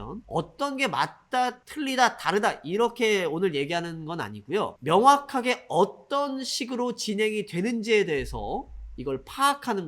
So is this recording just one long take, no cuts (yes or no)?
no